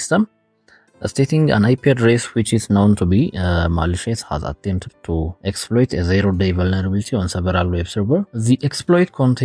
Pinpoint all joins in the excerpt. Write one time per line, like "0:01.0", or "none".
0:05.3
0:08.3